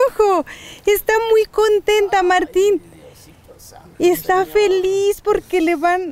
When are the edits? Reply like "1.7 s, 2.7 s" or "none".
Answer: none